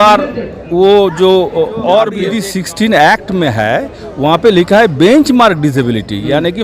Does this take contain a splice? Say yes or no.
yes